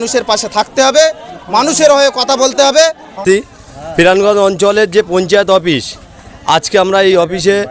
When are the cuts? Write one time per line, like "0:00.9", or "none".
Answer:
0:03.2